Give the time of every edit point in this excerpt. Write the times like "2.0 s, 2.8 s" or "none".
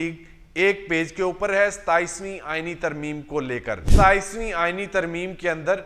3.9 s